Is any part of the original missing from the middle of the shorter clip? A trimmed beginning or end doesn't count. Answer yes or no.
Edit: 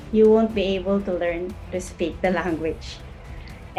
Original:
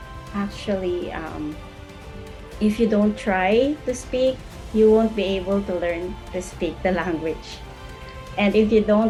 no